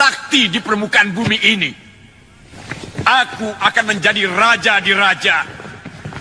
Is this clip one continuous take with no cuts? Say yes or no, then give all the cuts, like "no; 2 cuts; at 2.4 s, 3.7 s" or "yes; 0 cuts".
yes; 0 cuts